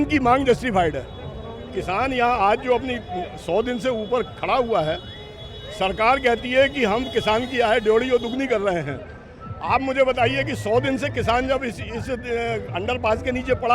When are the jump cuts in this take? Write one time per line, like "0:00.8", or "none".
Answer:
none